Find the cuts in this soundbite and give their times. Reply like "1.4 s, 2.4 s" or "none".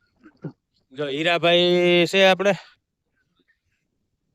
3.2 s